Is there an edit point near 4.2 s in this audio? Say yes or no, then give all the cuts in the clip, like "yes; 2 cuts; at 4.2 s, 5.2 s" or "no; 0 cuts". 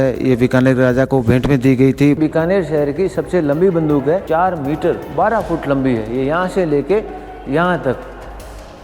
yes; 2 cuts; at 2.2 s, 4.2 s